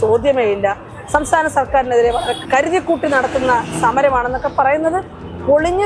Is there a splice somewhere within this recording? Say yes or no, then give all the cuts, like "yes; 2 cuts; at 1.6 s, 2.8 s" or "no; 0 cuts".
yes; 1 cut; at 2.4 s